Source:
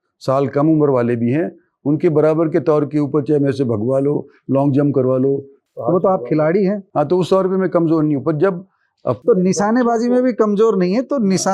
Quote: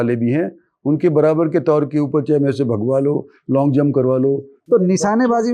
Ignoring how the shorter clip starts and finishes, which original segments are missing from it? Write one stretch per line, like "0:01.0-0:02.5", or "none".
0:05.6-0:09.1